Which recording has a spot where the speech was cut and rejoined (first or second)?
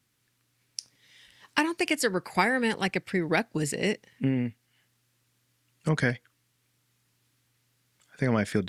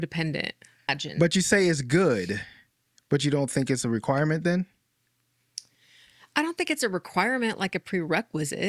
second